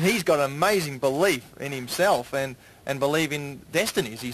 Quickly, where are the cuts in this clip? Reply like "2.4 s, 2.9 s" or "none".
2.4 s